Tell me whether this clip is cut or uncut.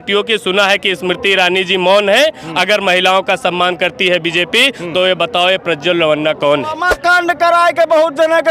cut